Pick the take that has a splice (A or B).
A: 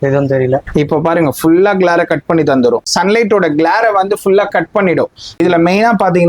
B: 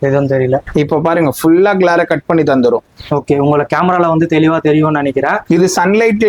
A